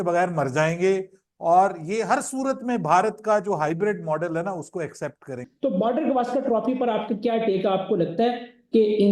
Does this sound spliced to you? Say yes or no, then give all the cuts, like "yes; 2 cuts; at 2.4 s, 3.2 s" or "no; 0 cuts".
yes; 1 cut; at 5.4 s